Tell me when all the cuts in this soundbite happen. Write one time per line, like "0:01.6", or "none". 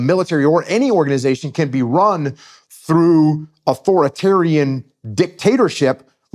none

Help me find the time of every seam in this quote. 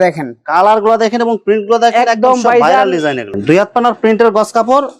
0:03.3

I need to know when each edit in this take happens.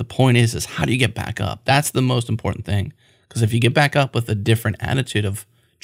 none

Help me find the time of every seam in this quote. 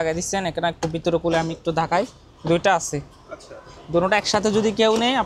none

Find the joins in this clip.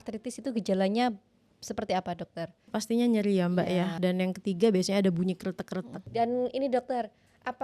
0:02.8
0:04.0
0:06.0

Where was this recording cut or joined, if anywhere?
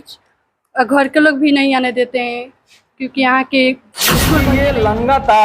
0:04.4

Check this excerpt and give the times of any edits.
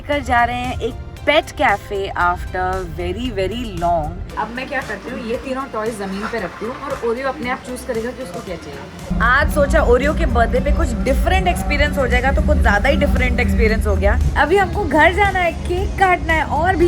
0:04.3
0:09.1
0:14.2

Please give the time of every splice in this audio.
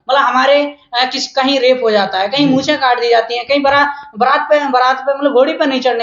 none

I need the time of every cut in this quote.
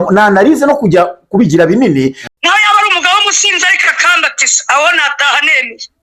0:02.2

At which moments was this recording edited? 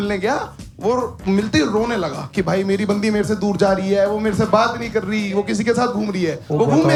none

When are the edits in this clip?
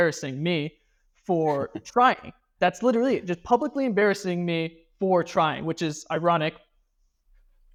none

